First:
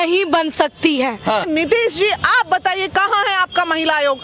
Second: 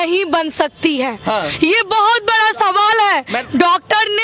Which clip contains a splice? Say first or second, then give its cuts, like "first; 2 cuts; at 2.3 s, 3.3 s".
first; 1 cut; at 1.4 s